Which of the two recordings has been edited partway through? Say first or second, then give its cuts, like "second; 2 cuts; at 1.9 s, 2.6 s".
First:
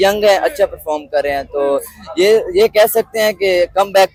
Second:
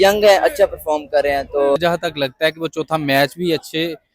second; 1 cut; at 1.8 s